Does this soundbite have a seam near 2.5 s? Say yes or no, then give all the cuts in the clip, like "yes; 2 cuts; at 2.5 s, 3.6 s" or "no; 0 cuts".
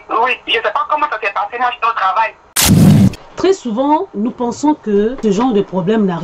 yes; 2 cuts; at 2.5 s, 5.2 s